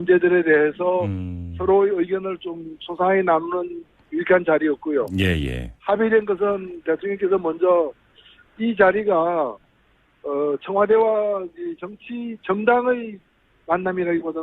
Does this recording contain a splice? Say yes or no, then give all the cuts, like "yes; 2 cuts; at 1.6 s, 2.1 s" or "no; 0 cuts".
yes; 1 cut; at 1.5 s